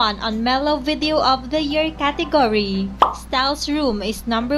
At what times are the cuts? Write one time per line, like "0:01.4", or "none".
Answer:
0:02.7

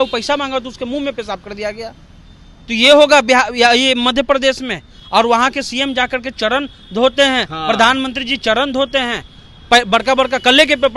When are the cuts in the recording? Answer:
none

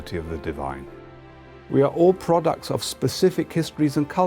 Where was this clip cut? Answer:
0:01.5

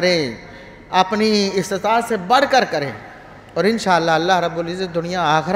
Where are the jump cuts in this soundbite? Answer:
none

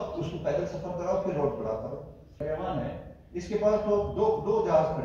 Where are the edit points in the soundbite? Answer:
0:02.4

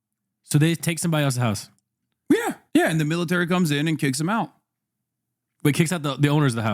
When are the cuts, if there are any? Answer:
0:02.6

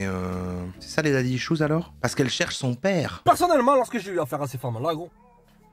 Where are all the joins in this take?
0:01.9
0:03.1

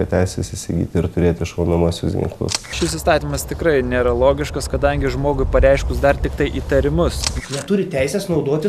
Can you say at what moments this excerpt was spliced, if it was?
0:02.7
0:07.2

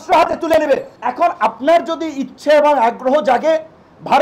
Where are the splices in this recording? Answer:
0:01.0

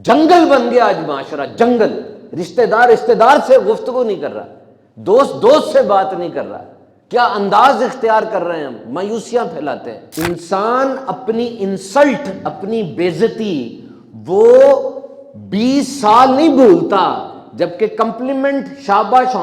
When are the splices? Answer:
0:10.0

